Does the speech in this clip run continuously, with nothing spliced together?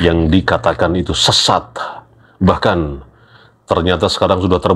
yes; 0 cuts

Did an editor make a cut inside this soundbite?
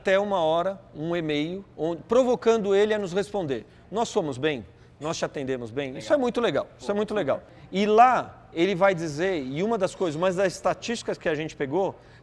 yes; 2 cuts; at 1.6 s, 7.5 s

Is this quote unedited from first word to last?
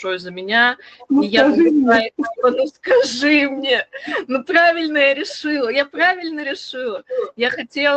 yes; 0 cuts

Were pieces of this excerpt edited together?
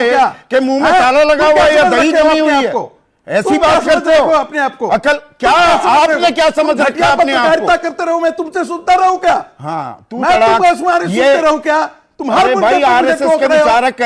no; 0 cuts

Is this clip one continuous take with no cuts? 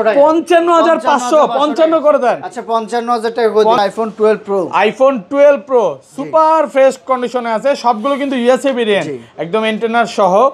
no; 1 cut; at 3.8 s

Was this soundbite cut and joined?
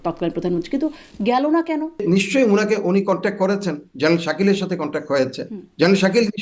yes; 1 cut; at 2.0 s

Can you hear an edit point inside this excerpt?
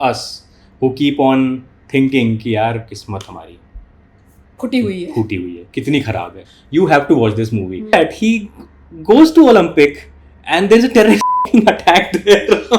yes; 2 cuts; at 6.5 s, 7.9 s

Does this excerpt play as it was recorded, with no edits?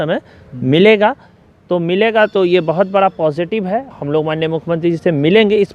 no; 1 cut; at 3.9 s

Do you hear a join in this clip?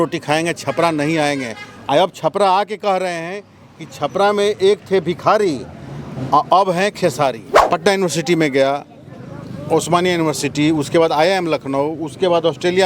yes; 1 cut; at 7.5 s

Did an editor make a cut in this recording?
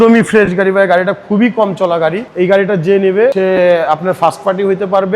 yes; 2 cuts; at 2.2 s, 3.3 s

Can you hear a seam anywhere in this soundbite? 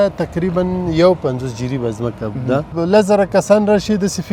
yes; 1 cut; at 2.7 s

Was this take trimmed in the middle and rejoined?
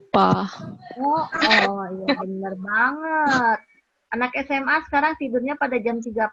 no; 0 cuts

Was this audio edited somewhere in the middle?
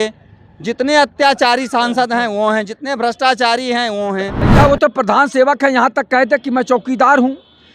yes; 1 cut; at 4.5 s

